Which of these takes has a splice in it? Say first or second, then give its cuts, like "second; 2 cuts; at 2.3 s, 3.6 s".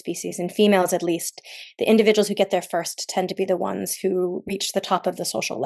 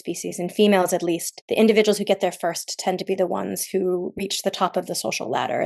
second; 1 cut; at 1.3 s